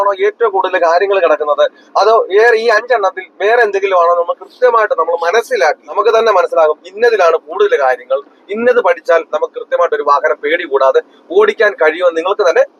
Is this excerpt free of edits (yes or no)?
no